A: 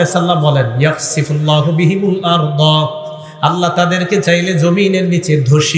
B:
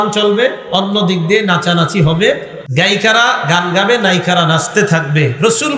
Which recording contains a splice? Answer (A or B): B